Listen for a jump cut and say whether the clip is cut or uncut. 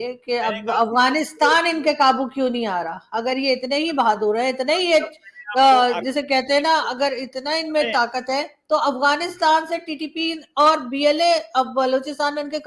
uncut